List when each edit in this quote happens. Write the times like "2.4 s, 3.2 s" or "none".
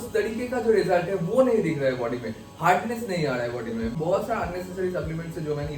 3.9 s